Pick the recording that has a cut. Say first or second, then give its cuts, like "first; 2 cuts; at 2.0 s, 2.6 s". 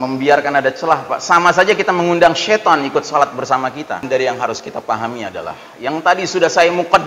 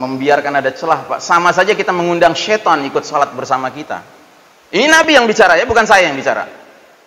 first; 1 cut; at 4.0 s